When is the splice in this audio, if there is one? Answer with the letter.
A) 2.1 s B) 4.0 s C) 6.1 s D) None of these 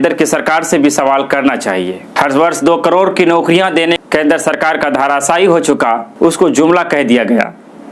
D